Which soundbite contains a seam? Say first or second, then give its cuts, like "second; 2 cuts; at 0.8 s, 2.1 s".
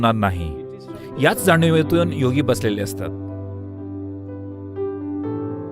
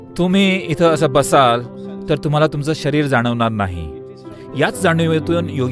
first; 1 cut; at 3.3 s